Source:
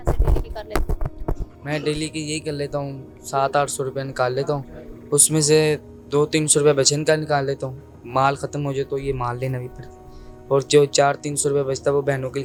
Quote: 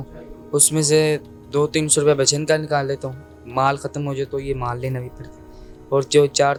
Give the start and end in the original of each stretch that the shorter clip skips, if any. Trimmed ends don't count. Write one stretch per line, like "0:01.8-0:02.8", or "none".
none